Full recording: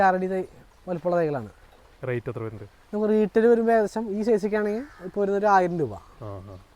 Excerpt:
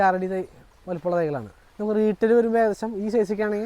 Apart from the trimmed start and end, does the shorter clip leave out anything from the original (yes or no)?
yes